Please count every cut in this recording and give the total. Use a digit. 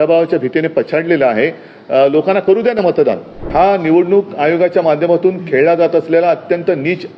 1